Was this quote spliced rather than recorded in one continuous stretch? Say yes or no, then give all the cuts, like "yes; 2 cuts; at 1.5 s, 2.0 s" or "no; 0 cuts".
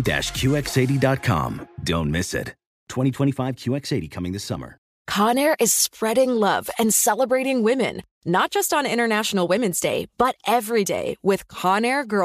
yes; 1 cut; at 4.9 s